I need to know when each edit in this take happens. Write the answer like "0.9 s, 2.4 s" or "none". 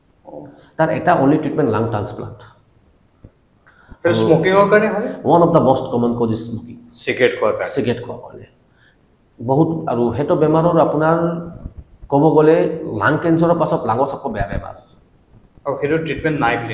none